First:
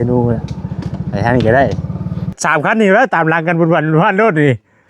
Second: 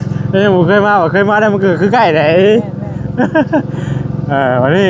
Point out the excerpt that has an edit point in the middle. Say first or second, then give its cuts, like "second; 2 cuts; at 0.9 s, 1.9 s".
first; 1 cut; at 2.4 s